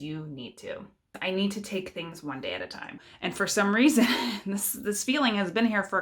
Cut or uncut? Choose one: cut